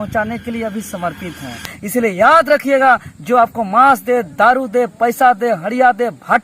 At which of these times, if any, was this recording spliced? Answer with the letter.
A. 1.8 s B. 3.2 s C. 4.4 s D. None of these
A